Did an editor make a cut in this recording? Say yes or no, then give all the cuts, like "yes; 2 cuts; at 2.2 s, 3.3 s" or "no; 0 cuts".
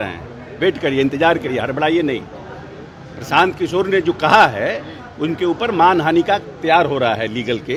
no; 0 cuts